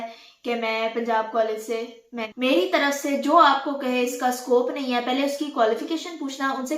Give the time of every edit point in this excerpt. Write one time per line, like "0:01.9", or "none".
0:02.3